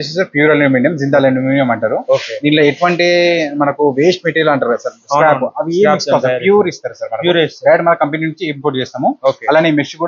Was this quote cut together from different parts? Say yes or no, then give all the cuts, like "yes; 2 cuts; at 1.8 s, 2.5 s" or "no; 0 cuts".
no; 0 cuts